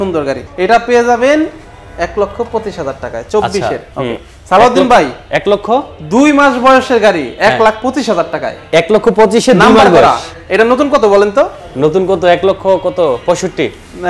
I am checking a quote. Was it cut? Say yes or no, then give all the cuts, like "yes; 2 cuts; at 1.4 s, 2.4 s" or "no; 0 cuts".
no; 0 cuts